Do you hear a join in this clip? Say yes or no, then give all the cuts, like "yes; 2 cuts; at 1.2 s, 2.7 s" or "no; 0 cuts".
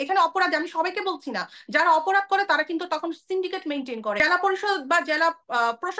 yes; 1 cut; at 4.2 s